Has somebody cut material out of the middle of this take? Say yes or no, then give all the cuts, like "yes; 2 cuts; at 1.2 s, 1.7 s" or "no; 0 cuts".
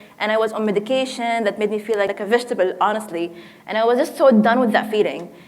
yes; 1 cut; at 2.1 s